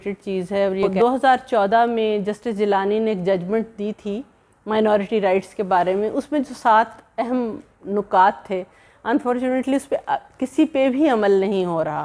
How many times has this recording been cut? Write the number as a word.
one